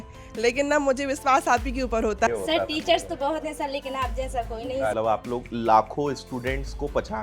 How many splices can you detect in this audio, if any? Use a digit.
2